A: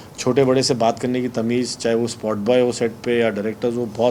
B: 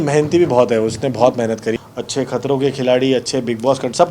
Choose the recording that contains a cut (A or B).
B